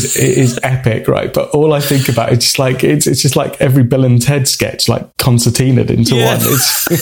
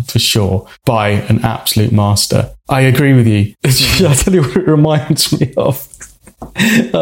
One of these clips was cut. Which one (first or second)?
second